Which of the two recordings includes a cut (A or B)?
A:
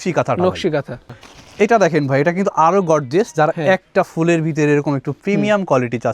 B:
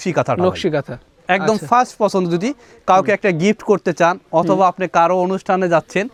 A